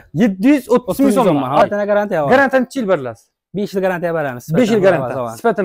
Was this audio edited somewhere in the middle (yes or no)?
yes